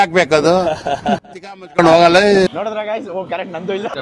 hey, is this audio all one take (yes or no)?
no